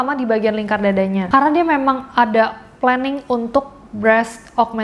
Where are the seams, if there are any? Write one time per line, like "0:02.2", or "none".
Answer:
0:01.3